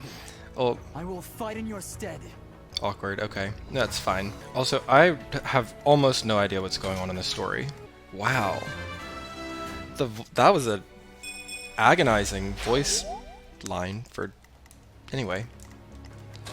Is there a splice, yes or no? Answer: yes